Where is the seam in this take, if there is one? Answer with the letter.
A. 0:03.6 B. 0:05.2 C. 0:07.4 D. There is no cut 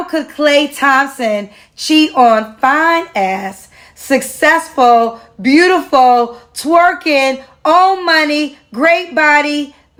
D